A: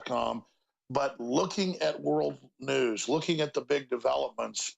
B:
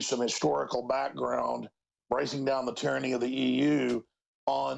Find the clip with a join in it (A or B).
A